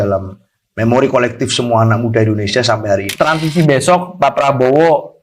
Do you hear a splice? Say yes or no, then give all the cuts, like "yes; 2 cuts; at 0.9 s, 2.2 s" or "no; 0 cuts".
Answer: yes; 1 cut; at 3.1 s